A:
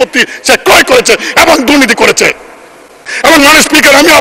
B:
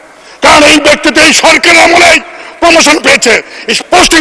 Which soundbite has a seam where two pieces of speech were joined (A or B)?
A